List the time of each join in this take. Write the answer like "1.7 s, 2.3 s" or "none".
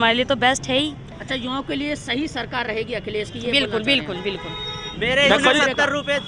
4.8 s